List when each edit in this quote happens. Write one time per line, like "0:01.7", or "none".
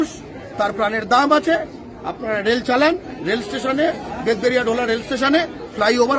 0:03.1